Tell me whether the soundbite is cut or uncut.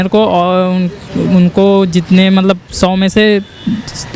uncut